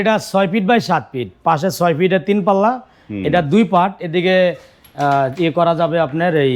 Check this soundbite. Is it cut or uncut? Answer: uncut